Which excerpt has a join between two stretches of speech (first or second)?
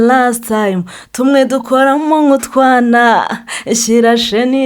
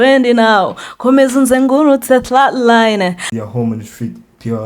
second